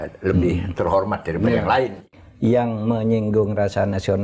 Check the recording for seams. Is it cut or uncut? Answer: cut